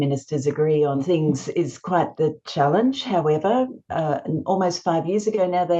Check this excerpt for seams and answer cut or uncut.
cut